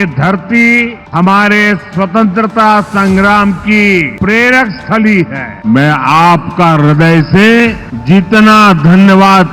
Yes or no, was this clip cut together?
yes